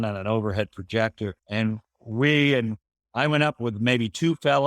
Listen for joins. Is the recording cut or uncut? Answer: cut